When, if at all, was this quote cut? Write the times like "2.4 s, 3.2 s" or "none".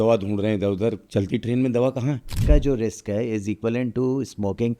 1.0 s, 2.3 s